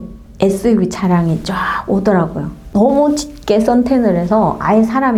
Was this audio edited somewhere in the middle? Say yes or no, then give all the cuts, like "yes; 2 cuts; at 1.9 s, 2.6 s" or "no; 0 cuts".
no; 0 cuts